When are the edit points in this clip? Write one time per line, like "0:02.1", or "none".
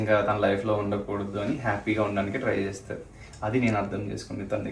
none